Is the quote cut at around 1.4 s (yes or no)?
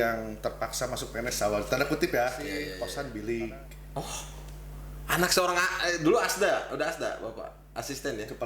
no